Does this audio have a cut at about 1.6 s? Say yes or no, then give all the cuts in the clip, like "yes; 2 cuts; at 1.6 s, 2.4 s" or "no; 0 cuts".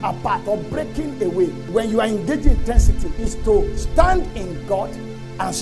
yes; 1 cut; at 1.6 s